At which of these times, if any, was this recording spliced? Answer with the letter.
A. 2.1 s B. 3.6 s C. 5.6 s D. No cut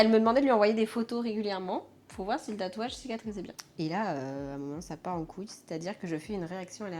B